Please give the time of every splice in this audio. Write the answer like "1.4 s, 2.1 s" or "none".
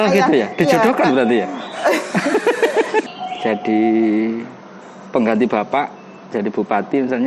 3.1 s